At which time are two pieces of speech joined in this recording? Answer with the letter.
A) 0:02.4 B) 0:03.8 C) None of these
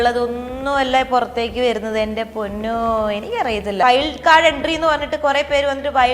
B